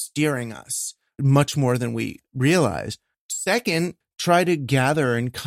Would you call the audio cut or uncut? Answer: cut